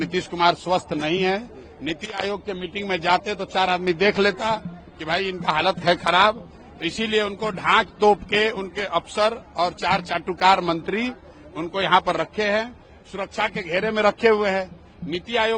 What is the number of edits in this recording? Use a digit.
0